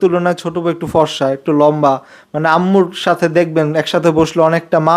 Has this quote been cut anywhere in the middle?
no; 0 cuts

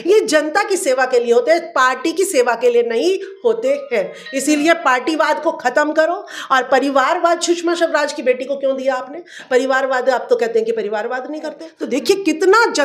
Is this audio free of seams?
no; 1 cut; at 11.7 s

